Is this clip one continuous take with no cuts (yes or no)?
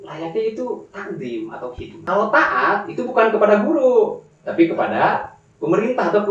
no